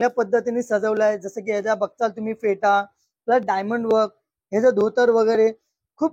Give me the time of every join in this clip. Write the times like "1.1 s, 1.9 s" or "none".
none